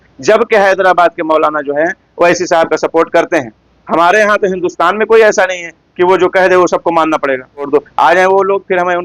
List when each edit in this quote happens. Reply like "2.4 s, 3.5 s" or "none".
3.7 s, 7.7 s

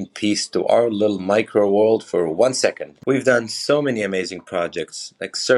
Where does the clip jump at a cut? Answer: 2.9 s

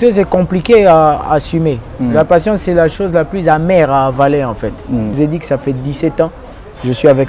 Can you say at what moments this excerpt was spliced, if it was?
5.1 s

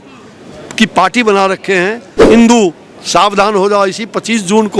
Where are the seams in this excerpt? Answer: 2.1 s

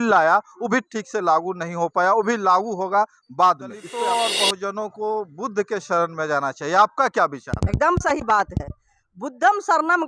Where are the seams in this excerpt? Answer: 3.8 s

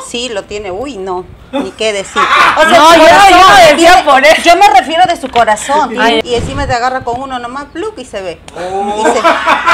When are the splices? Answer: 6.2 s

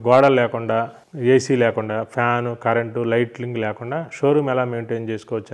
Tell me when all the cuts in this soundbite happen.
1.0 s

